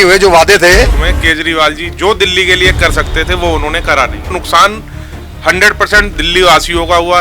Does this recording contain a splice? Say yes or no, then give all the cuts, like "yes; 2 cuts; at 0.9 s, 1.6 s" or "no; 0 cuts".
yes; 2 cuts; at 1.1 s, 4.3 s